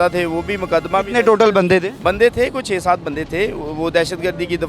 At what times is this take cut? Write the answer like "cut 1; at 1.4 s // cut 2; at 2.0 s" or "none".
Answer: cut 1; at 1.9 s